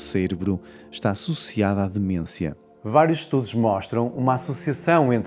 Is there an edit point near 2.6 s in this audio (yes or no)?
yes